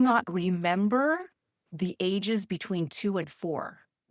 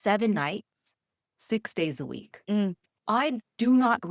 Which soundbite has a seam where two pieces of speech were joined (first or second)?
second